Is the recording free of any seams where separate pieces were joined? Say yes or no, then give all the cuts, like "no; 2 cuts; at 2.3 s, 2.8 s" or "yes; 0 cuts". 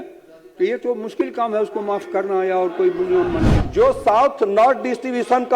no; 1 cut; at 3.6 s